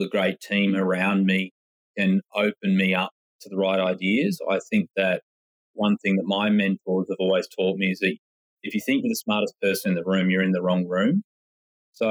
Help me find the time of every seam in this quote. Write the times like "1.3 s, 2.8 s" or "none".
none